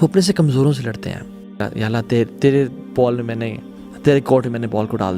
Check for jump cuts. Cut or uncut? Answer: cut